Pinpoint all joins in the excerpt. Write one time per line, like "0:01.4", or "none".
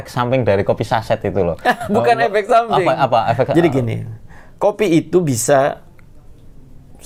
none